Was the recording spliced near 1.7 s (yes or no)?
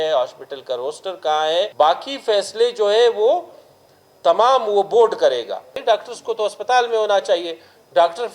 yes